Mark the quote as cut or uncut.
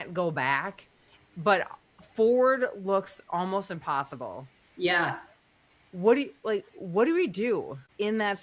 uncut